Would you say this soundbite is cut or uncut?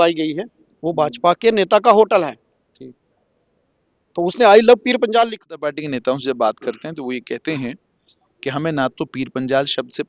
cut